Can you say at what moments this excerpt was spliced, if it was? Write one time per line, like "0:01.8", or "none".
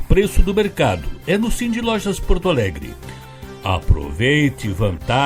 none